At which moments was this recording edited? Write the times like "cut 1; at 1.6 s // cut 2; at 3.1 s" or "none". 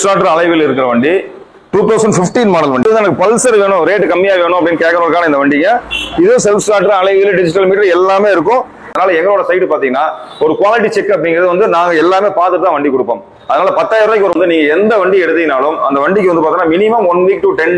cut 1; at 2.8 s // cut 2; at 8.9 s // cut 3; at 14.3 s